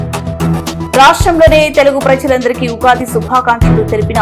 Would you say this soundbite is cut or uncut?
cut